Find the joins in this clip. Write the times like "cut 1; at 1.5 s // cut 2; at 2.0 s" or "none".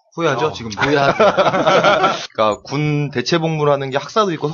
cut 1; at 2.2 s